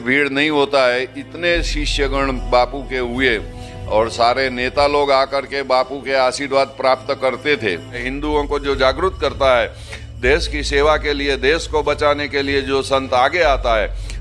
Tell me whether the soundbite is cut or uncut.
cut